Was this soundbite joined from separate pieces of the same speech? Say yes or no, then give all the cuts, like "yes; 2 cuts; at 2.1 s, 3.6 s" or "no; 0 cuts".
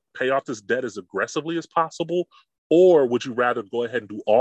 no; 0 cuts